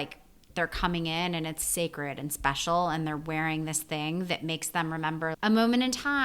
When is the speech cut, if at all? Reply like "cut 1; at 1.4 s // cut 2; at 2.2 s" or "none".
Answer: cut 1; at 1.6 s // cut 2; at 5.3 s